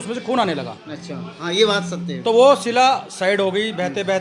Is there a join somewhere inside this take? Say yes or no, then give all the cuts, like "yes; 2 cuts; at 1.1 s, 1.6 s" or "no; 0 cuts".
no; 0 cuts